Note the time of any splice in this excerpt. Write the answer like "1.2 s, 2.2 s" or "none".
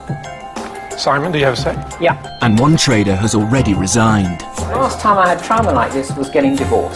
2.3 s